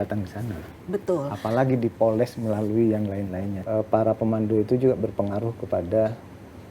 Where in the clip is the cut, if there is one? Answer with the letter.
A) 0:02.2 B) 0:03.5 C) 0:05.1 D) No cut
B